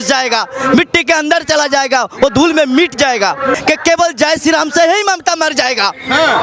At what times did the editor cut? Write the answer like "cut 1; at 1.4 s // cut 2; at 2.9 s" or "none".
cut 1; at 3.5 s